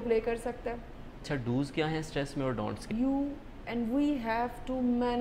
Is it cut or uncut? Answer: cut